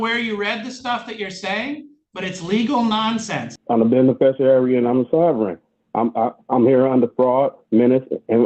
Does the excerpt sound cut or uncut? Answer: cut